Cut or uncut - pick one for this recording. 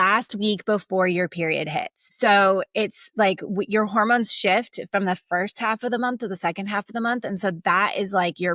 uncut